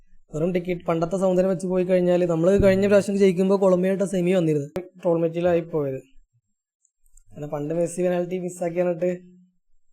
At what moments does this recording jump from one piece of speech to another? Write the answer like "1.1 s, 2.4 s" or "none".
4.9 s